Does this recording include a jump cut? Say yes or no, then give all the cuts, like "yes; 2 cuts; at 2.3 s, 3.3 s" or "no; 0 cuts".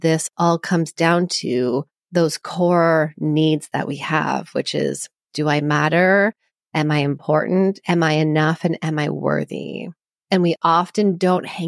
yes; 1 cut; at 2.0 s